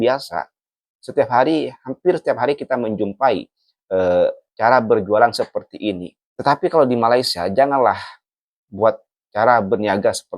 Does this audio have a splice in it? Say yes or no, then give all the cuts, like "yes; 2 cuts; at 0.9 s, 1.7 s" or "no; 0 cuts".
yes; 1 cut; at 9.2 s